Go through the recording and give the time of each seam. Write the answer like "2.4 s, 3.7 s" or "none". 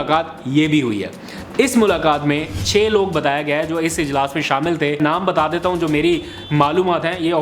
2.6 s, 5.0 s